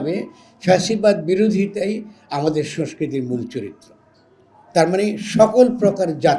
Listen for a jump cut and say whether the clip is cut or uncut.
uncut